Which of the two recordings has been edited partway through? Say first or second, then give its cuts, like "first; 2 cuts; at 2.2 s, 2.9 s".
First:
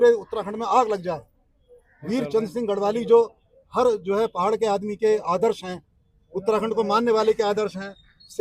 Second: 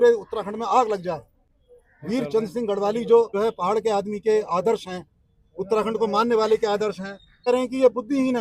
second; 2 cuts; at 3.3 s, 7.5 s